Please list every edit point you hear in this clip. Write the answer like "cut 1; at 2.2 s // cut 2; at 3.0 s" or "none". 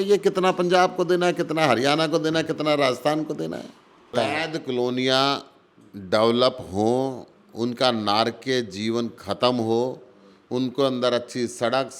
cut 1; at 4.1 s